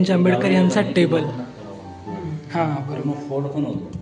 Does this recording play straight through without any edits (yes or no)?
yes